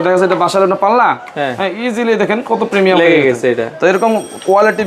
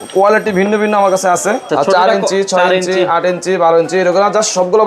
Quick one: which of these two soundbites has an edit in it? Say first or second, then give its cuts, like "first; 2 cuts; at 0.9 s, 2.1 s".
second; 1 cut; at 1.7 s